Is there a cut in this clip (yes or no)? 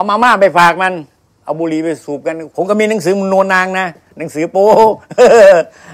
yes